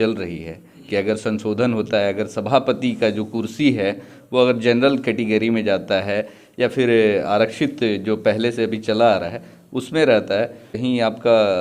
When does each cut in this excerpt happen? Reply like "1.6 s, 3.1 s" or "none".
10.7 s

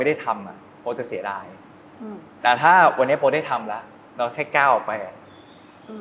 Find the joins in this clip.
none

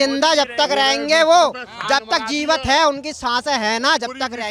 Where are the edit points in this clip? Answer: none

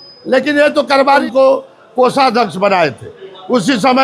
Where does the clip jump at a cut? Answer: 1.2 s

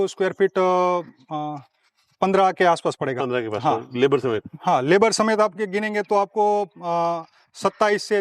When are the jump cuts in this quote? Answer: none

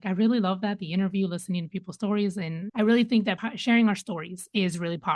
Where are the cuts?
2.6 s, 3.5 s

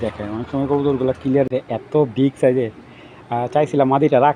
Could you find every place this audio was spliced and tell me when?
1.5 s

